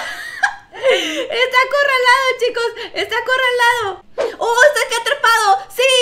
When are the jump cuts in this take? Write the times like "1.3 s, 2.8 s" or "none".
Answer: 4.0 s